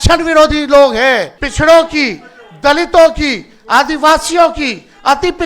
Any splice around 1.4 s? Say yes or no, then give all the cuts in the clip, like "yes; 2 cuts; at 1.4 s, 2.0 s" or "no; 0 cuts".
yes; 1 cut; at 1.4 s